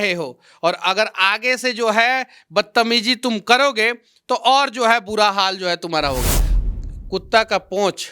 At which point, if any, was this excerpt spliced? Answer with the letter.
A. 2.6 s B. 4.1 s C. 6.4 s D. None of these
C